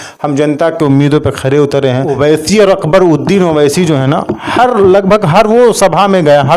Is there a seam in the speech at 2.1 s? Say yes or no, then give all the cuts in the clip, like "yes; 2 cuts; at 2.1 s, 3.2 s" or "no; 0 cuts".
yes; 1 cut; at 2.1 s